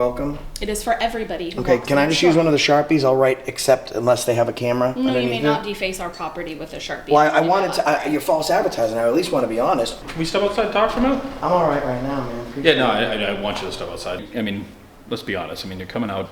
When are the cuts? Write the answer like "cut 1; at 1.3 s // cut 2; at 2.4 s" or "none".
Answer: cut 1; at 9.9 s // cut 2; at 14.2 s